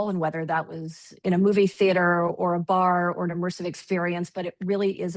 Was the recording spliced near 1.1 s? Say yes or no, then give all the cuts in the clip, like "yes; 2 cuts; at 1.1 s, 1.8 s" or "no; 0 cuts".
yes; 1 cut; at 1.1 s